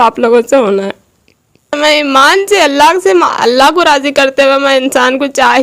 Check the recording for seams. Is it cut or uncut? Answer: uncut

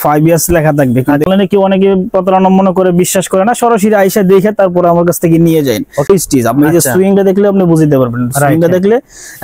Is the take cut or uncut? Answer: cut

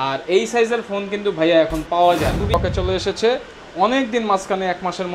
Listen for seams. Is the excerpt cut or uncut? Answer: cut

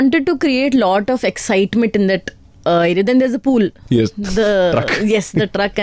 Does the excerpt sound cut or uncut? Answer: uncut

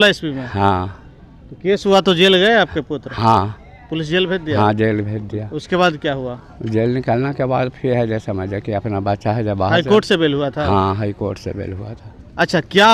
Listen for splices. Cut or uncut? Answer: uncut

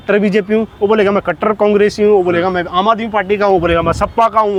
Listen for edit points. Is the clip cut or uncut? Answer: uncut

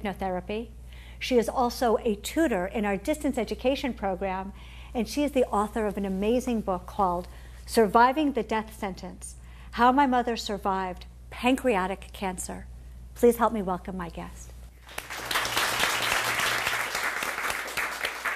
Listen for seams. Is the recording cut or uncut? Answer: cut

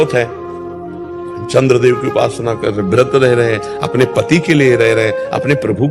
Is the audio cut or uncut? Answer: uncut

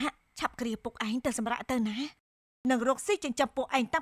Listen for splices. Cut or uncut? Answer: cut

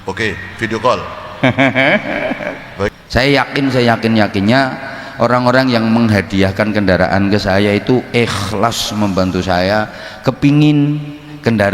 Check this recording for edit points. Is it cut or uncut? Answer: cut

